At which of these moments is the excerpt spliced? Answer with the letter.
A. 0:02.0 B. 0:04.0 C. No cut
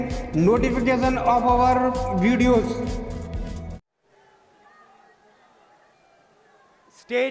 B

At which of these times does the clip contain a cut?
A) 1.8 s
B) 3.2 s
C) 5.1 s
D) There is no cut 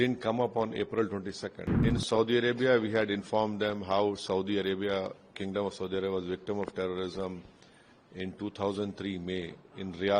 A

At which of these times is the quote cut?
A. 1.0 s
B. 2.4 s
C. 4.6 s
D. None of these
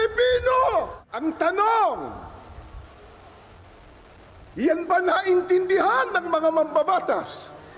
A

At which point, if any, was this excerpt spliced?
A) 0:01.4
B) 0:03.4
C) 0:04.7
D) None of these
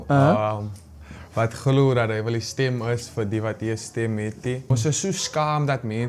C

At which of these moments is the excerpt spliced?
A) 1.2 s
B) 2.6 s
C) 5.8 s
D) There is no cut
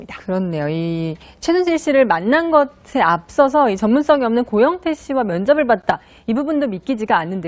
D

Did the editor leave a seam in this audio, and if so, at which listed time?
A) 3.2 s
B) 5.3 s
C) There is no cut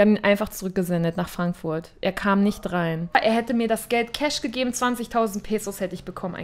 A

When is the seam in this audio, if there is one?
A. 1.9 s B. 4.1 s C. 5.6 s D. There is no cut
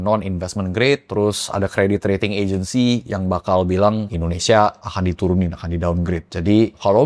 B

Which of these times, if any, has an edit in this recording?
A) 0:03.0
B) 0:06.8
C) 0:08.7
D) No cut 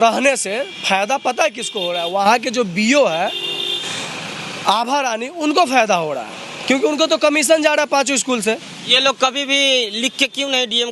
D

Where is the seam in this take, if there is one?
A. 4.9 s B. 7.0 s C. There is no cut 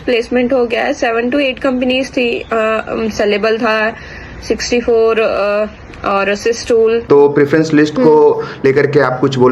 B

